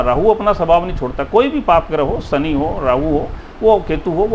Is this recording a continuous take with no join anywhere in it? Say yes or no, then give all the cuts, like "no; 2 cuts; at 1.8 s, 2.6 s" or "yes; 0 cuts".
yes; 0 cuts